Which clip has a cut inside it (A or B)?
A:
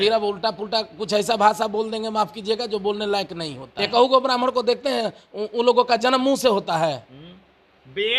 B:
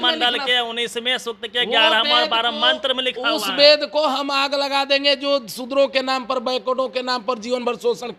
A